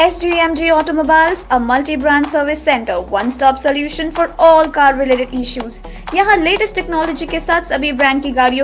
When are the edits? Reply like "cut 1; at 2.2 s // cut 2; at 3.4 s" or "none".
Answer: none